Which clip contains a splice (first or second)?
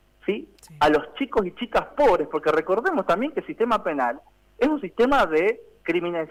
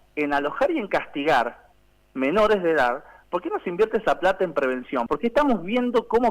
second